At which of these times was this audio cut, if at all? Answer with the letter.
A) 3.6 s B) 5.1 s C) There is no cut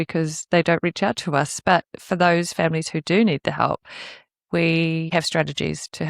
B